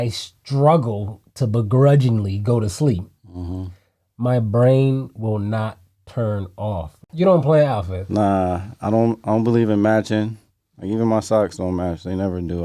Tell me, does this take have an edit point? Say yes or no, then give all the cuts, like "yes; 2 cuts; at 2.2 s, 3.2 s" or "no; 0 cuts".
yes; 1 cut; at 7.0 s